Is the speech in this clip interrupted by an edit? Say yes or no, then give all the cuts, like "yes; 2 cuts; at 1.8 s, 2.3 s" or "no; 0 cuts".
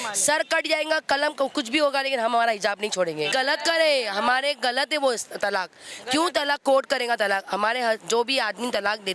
yes; 1 cut; at 3.3 s